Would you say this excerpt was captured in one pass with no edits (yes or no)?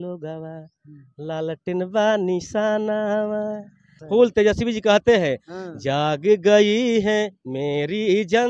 no